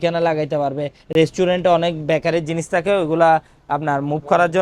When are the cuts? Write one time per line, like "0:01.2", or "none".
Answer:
none